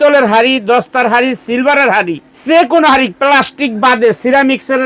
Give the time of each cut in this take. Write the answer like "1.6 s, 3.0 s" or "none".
2.2 s